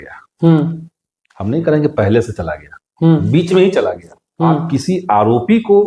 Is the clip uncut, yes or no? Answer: no